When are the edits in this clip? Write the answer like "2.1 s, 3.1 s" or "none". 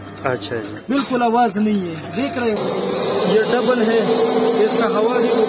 2.6 s